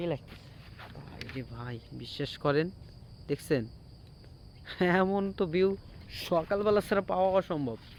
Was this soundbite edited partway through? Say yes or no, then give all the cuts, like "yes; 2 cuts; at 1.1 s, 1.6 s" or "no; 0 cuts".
no; 0 cuts